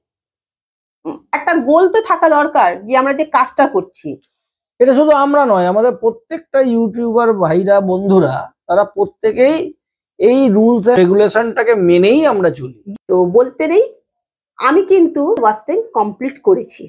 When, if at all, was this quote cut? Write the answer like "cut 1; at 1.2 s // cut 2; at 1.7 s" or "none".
cut 1; at 11.0 s // cut 2; at 12.7 s // cut 3; at 15.4 s